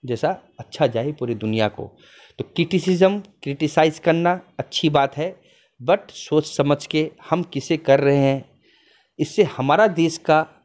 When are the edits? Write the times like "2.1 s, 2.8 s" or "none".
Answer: none